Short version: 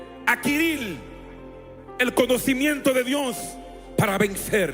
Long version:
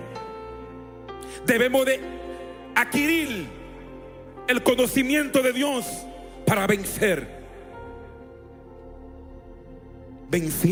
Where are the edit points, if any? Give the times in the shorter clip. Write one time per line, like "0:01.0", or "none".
none